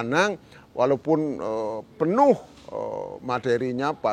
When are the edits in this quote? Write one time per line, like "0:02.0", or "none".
none